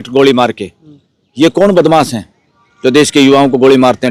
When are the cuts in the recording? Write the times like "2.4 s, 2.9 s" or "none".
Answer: none